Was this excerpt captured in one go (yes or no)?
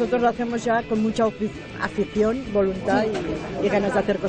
yes